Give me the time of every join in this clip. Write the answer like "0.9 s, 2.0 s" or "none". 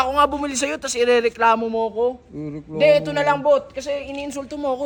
none